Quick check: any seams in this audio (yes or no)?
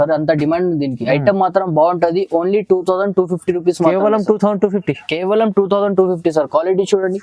no